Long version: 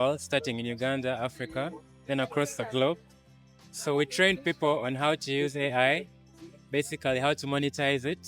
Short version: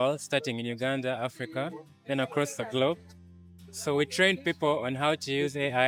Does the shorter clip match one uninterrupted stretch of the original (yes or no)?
yes